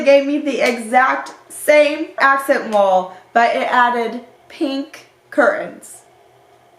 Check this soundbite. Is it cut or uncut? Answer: cut